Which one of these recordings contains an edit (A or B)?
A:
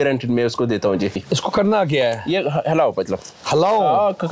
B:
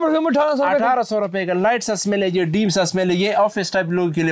A